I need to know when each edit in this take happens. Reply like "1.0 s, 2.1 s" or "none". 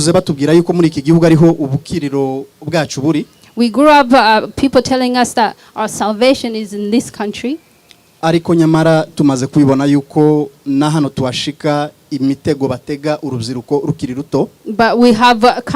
none